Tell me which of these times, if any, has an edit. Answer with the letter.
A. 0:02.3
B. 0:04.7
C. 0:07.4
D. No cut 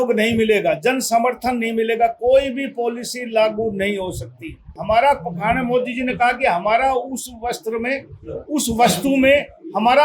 B